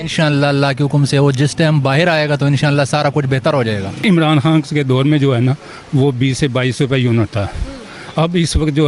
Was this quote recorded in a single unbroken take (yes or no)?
no